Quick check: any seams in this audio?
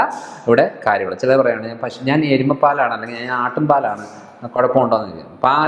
no; 0 cuts

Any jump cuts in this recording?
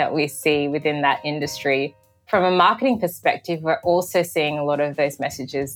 yes; 1 cut; at 2.2 s

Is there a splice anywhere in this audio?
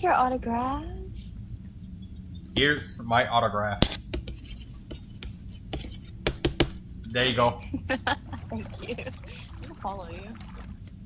no; 0 cuts

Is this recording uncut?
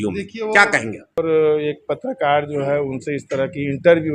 no; 1 cut; at 1.2 s

